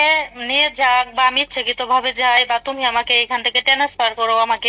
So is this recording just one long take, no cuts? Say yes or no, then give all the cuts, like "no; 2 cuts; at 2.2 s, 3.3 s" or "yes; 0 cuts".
yes; 0 cuts